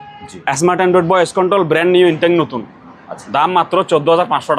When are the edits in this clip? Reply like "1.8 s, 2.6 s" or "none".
none

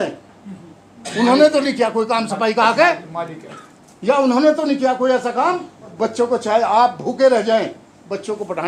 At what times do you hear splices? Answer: 5.9 s

